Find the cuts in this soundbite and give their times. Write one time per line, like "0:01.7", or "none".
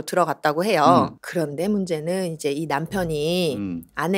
0:01.2